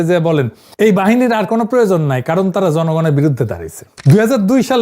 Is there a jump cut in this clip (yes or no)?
yes